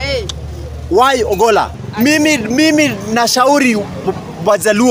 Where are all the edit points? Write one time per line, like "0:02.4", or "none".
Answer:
0:01.8